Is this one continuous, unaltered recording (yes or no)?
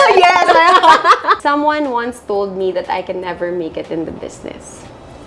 no